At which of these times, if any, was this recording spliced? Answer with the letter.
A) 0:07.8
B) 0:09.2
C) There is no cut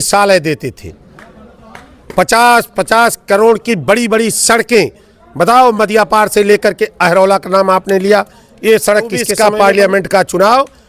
B